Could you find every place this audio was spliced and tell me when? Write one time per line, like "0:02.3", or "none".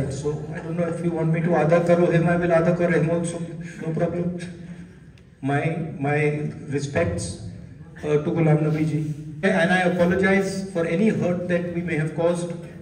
0:09.4